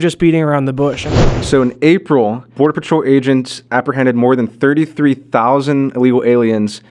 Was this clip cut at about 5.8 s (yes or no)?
no